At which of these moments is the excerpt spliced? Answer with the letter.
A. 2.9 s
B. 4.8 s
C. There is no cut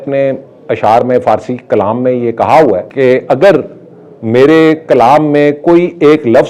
A